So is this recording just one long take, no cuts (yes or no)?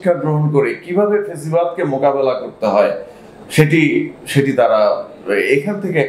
yes